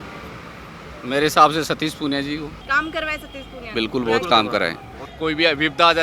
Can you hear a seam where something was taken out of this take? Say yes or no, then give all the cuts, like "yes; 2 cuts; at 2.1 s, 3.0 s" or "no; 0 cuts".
yes; 2 cuts; at 2.6 s, 5.0 s